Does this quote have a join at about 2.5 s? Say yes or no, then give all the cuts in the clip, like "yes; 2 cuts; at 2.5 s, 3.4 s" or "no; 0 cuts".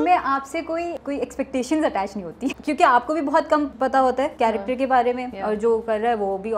yes; 4 cuts; at 1.0 s, 2.5 s, 4.2 s, 5.3 s